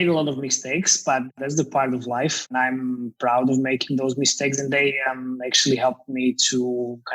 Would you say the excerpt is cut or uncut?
cut